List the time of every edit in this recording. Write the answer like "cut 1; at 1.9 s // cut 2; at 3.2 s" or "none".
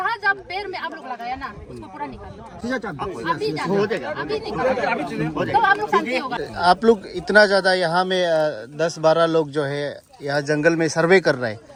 none